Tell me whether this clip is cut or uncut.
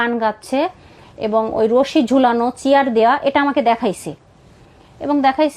uncut